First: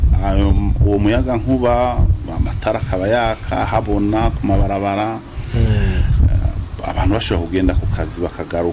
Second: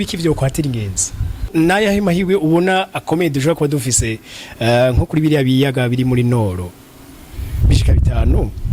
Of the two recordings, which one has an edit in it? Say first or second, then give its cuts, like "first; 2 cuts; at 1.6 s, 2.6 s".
second; 1 cut; at 1.5 s